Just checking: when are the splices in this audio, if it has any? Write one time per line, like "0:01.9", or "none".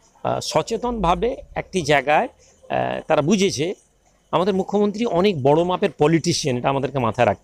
none